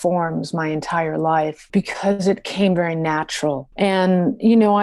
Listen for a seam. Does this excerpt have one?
yes; 2 cuts; at 1.6 s, 3.7 s

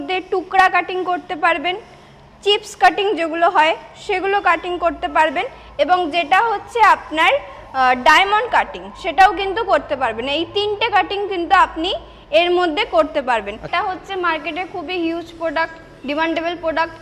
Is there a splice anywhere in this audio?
yes; 1 cut; at 13.7 s

